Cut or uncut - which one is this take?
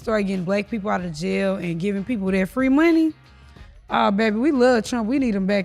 uncut